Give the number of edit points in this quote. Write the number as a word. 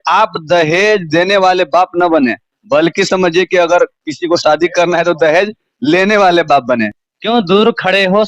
one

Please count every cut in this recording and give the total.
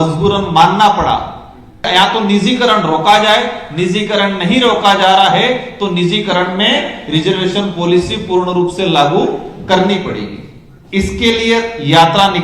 one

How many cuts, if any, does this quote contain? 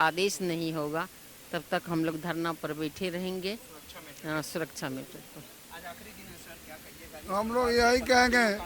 zero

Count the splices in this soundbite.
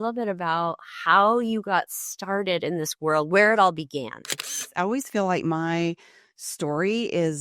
one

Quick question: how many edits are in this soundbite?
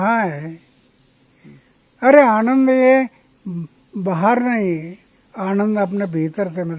zero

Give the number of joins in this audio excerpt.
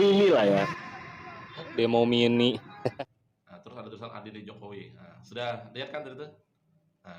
one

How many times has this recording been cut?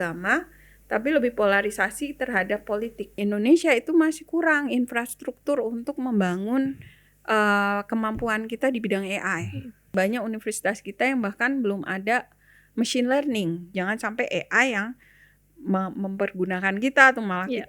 three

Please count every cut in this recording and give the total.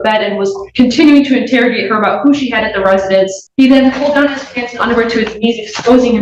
one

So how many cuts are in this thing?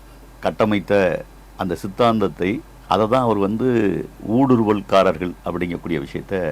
one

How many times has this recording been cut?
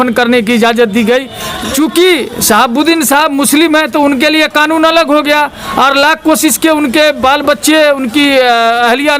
one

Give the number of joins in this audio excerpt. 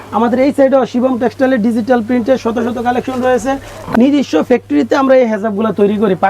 one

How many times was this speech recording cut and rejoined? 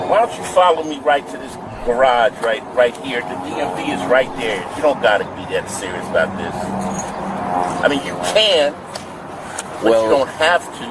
zero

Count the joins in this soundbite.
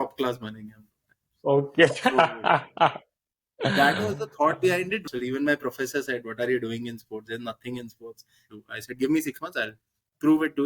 two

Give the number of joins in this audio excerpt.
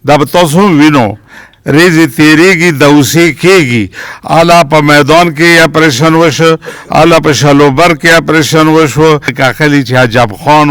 one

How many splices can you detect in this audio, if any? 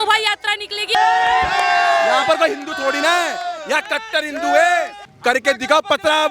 two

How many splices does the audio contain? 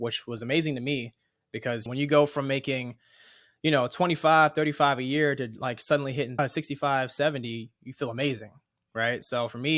two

